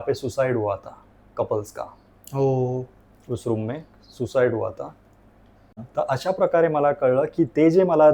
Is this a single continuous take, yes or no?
yes